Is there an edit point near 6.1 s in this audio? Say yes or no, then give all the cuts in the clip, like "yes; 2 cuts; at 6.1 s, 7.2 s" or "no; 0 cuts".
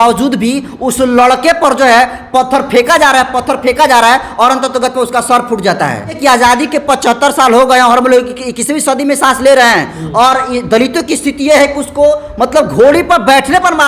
yes; 1 cut; at 6.1 s